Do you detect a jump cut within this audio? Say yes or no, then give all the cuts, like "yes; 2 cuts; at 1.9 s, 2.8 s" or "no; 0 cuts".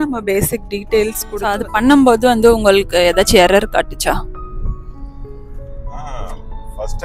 yes; 1 cut; at 1.3 s